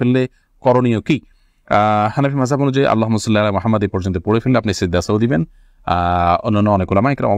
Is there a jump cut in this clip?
no; 0 cuts

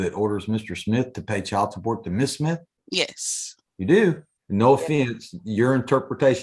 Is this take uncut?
no; 2 cuts; at 2.8 s, 4.3 s

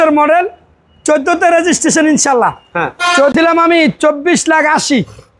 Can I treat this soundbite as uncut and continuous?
no; 1 cut; at 3.3 s

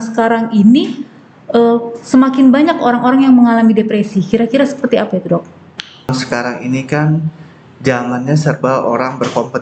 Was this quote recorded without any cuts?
no; 1 cut; at 6.1 s

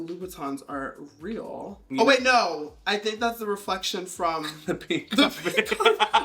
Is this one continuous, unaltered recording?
no; 1 cut; at 1.8 s

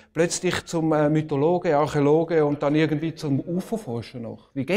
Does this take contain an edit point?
yes; 1 cut; at 3.9 s

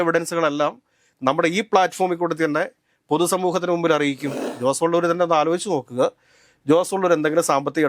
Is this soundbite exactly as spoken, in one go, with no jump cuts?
no; 1 cut; at 4.5 s

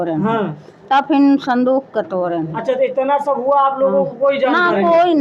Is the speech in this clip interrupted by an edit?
no; 0 cuts

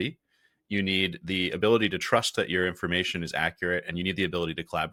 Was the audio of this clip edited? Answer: no; 0 cuts

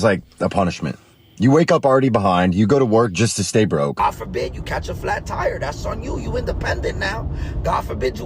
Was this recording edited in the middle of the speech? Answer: yes; 1 cut; at 4.0 s

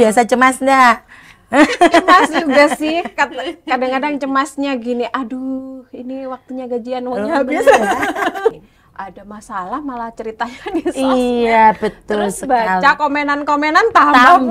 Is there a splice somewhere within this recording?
yes; 1 cut; at 8.7 s

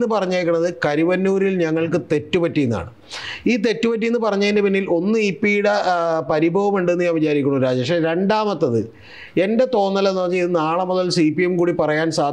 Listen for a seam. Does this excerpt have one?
no; 0 cuts

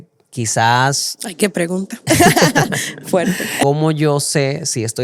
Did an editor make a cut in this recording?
yes; 1 cut; at 3.6 s

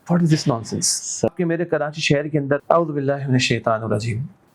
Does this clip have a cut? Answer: yes; 2 cuts; at 1.3 s, 2.6 s

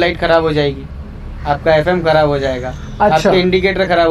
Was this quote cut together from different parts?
no; 0 cuts

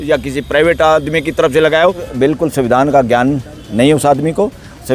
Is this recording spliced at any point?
yes; 1 cut; at 2.1 s

